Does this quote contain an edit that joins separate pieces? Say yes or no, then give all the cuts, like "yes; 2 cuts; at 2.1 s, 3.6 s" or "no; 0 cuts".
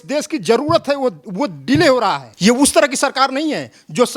yes; 1 cut; at 2.3 s